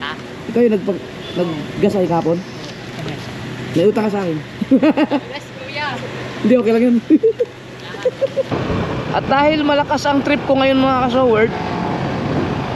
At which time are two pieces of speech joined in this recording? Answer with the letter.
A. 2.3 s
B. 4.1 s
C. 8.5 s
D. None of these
C